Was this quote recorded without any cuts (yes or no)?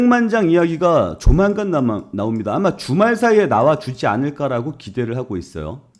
yes